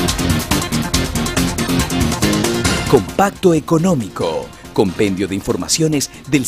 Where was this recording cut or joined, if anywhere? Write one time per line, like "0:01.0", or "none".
0:04.1